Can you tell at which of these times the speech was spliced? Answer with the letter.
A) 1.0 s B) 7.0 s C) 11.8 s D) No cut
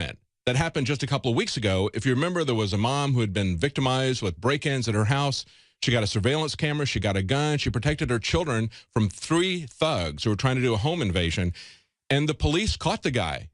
C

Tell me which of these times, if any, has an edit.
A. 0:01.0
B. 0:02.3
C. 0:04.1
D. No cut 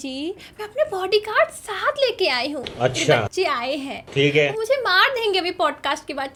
D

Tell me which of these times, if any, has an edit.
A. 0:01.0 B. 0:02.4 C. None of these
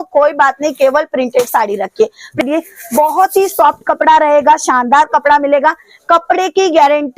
B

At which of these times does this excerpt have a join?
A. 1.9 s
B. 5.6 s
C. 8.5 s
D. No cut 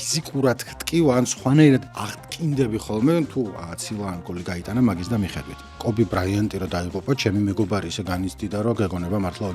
B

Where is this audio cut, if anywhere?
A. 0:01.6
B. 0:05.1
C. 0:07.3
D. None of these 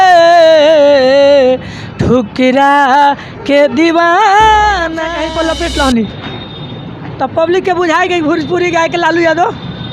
B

